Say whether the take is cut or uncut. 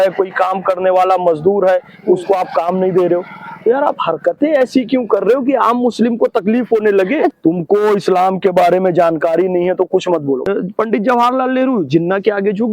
cut